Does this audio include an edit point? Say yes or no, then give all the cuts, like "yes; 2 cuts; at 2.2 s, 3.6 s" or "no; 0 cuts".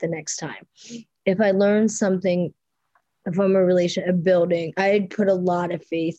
no; 0 cuts